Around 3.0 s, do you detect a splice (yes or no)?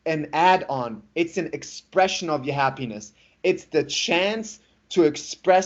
no